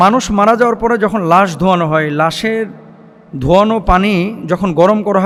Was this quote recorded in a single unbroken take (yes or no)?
yes